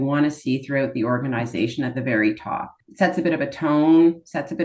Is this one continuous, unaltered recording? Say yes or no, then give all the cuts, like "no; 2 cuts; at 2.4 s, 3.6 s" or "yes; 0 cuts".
no; 1 cut; at 2.8 s